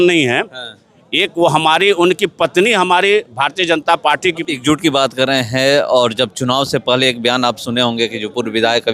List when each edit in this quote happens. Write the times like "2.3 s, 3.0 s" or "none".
4.4 s